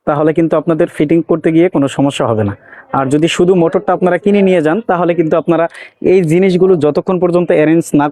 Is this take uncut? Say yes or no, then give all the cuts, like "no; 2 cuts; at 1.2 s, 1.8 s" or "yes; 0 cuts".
yes; 0 cuts